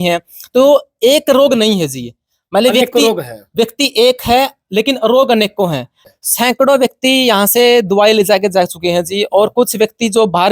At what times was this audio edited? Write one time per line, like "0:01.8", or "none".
0:06.0